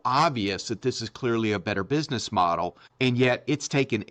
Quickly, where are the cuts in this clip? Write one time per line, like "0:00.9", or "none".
0:02.8